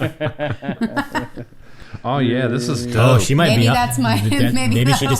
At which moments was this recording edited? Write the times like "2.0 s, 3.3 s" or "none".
3.0 s